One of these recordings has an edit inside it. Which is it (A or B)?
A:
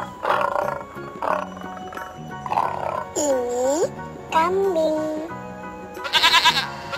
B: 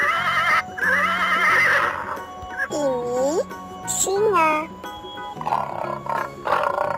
A